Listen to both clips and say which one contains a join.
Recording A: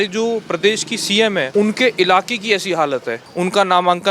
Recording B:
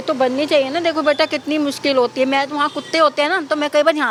A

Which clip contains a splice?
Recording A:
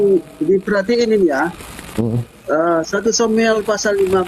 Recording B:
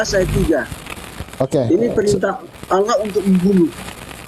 B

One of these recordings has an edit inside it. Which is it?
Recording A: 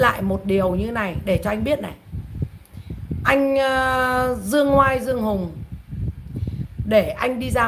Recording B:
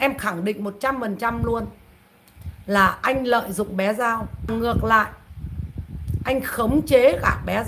B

